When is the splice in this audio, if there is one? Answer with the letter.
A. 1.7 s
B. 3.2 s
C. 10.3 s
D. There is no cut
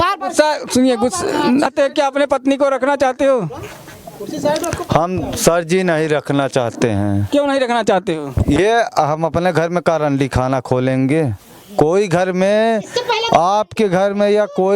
A